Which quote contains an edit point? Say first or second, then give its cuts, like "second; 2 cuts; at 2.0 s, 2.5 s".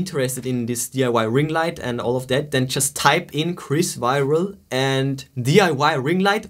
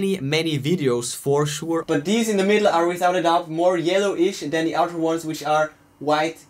second; 1 cut; at 1.8 s